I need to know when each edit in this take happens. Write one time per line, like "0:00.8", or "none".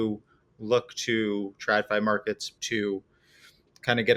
0:02.5